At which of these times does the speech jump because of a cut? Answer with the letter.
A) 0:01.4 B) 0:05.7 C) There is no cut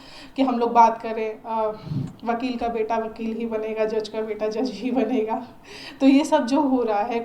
A